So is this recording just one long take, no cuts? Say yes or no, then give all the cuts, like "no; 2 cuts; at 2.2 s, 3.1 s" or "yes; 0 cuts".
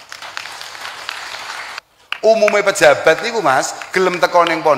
no; 1 cut; at 1.8 s